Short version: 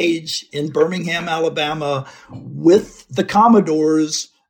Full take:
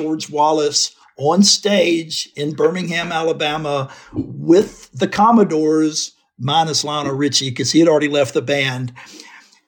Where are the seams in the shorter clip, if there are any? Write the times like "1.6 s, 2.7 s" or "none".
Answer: none